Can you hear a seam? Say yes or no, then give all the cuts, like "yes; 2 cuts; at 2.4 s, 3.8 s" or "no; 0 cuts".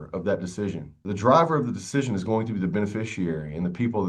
no; 0 cuts